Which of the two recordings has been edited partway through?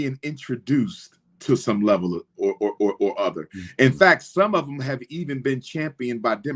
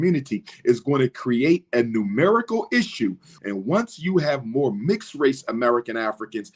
second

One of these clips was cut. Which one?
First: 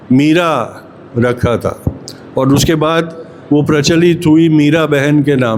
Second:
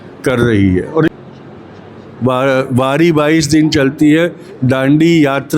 second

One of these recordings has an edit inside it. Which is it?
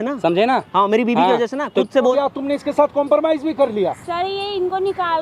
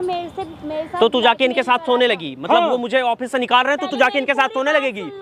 first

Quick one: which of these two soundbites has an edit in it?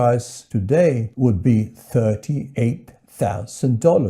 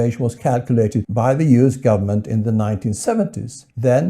second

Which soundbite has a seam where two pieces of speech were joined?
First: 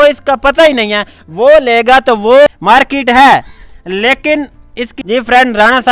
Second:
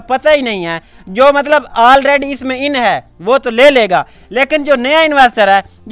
first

